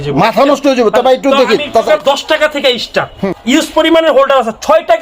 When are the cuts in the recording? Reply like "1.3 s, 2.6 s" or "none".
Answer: 1.9 s, 3.2 s